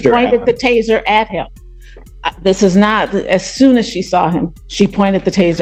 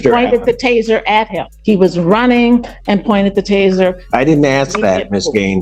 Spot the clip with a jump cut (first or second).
second